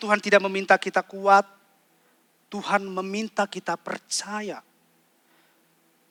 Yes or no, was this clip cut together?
no